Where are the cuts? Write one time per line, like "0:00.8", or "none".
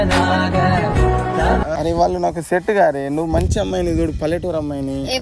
0:01.8